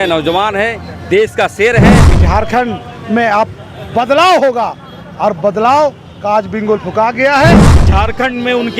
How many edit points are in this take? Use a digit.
2